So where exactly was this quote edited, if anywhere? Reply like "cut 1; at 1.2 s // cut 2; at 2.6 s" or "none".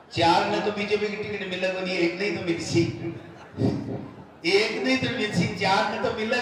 none